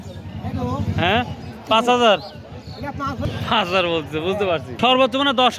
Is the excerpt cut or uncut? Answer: uncut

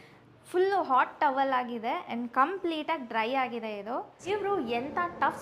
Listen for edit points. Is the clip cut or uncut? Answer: cut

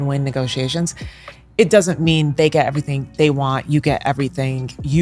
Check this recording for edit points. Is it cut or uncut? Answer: uncut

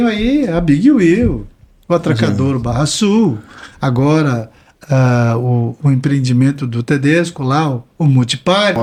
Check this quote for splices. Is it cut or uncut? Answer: uncut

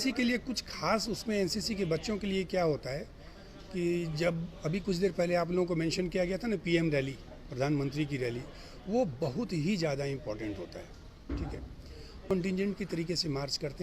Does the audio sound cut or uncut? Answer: cut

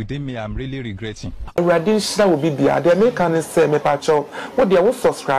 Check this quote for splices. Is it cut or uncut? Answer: cut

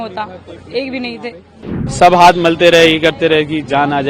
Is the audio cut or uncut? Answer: cut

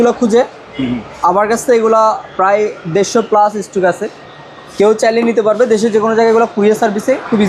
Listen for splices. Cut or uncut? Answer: uncut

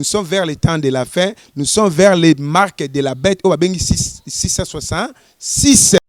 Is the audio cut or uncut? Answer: uncut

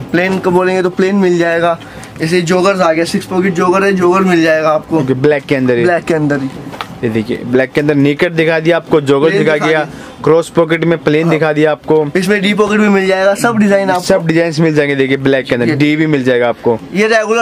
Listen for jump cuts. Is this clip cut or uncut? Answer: uncut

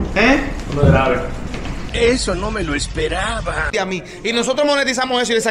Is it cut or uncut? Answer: cut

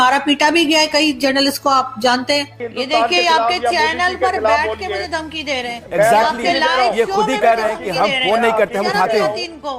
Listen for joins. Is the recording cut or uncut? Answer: cut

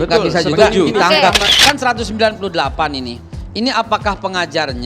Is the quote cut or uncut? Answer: cut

